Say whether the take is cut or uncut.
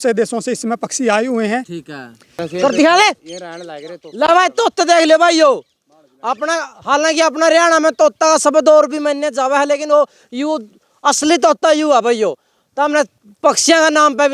cut